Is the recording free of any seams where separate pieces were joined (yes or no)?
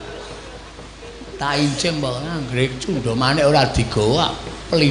yes